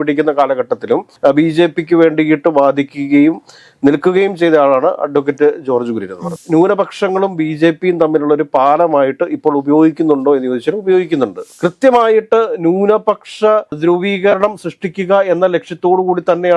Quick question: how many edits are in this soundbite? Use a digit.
2